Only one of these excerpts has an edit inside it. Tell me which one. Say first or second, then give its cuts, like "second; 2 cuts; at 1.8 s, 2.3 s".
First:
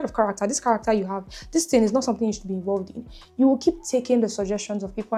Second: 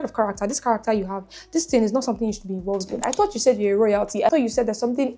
second; 2 cuts; at 2.8 s, 4.3 s